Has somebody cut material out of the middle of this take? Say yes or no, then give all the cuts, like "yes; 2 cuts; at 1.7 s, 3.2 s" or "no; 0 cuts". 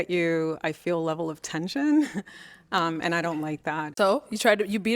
yes; 1 cut; at 3.9 s